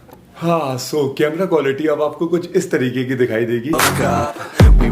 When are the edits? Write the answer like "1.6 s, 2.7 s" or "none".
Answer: 3.8 s